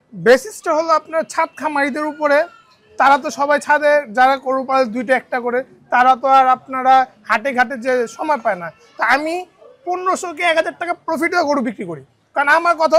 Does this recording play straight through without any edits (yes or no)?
yes